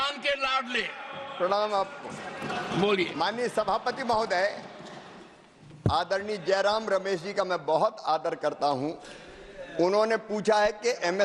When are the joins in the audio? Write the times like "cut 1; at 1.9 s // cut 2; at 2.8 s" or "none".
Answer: none